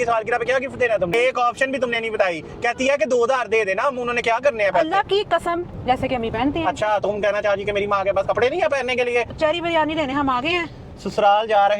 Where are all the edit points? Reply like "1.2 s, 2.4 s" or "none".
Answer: 1.1 s, 5.8 s, 9.3 s